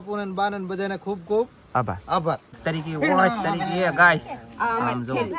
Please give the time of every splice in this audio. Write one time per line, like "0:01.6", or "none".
0:02.6